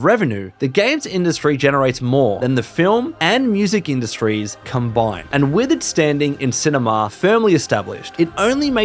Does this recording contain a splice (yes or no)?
no